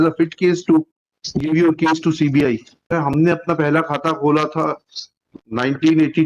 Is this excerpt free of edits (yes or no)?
no